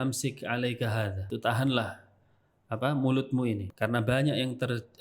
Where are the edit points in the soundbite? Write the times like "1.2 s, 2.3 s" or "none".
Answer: 1.3 s, 3.7 s